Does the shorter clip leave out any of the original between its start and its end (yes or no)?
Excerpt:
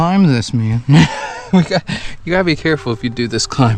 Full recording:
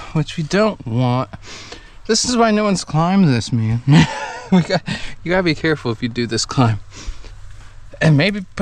no